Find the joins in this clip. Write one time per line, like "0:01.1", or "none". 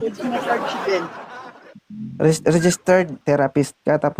0:03.2